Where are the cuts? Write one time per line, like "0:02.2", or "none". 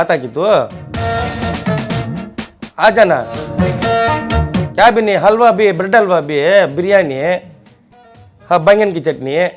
none